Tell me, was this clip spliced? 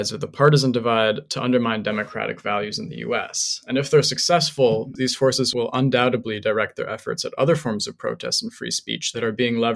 yes; 1 cut; at 4.9 s

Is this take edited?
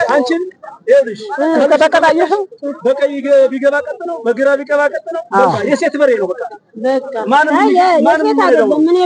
no; 0 cuts

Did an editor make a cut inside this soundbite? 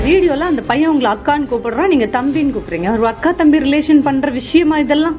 no; 0 cuts

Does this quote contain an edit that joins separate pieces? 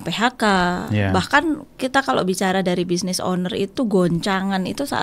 no; 0 cuts

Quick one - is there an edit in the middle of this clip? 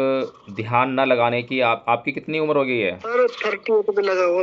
yes; 1 cut; at 3.0 s

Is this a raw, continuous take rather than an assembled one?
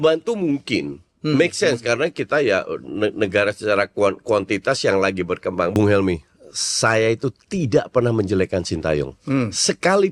no; 1 cut; at 5.7 s

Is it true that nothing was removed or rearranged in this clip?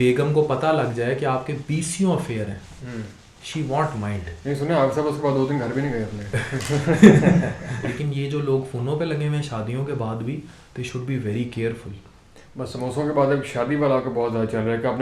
no; 1 cut; at 7.9 s

